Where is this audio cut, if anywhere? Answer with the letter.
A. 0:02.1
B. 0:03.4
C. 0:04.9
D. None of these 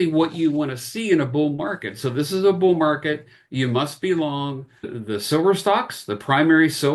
C